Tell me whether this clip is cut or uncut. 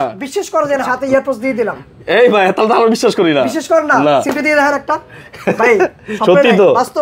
cut